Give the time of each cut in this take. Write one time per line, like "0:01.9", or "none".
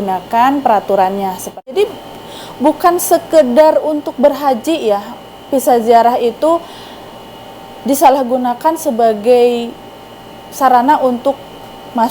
0:01.7

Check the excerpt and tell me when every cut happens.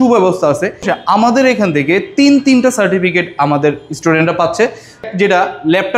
0:00.9
0:05.0

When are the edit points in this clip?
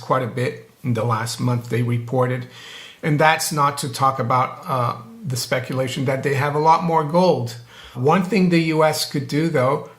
0:07.9

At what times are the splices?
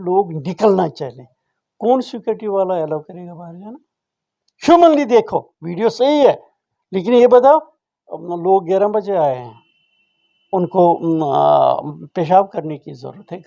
none

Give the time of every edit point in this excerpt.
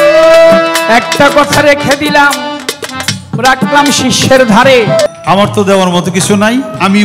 0:05.1

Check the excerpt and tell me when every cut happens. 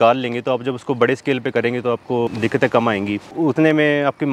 0:02.3
0:03.3

